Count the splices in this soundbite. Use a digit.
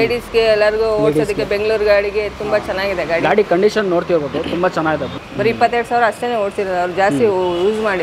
1